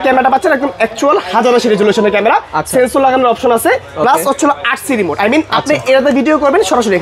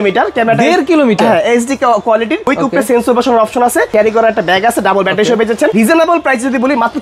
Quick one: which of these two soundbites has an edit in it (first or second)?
second